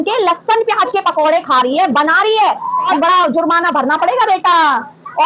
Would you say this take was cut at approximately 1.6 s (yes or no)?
no